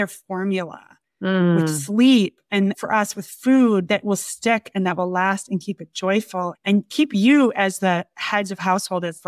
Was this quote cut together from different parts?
yes; 2 cuts; at 2.5 s, 3.8 s

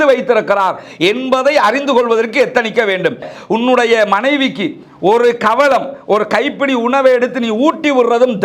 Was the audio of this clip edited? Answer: yes; 1 cut; at 3.3 s

